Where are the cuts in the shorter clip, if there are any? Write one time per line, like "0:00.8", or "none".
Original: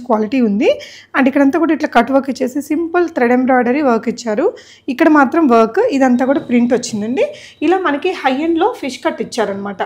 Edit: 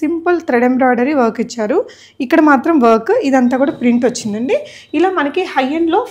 none